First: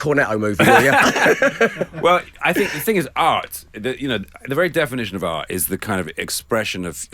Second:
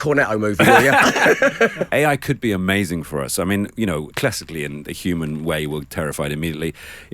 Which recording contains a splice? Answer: second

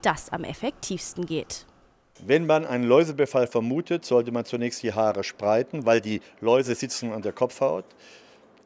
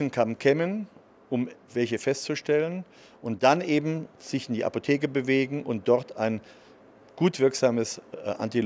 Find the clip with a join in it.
second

